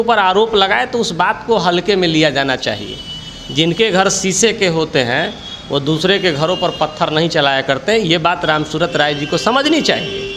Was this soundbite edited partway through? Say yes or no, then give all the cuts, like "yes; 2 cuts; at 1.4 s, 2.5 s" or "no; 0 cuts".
no; 0 cuts